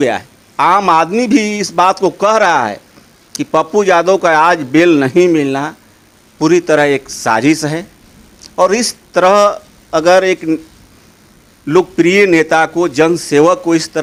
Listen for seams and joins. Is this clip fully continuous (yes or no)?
yes